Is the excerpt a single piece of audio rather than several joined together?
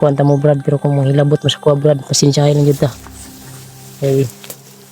yes; 0 cuts

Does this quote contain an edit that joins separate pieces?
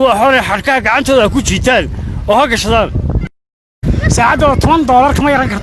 yes; 1 cut; at 3.4 s

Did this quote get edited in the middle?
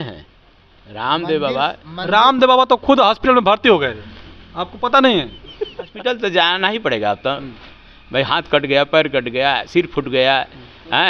yes; 1 cut; at 5.9 s

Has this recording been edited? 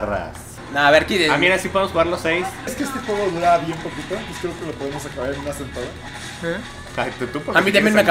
yes; 1 cut; at 2.7 s

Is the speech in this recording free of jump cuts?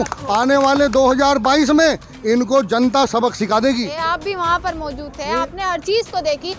no; 1 cut; at 3.9 s

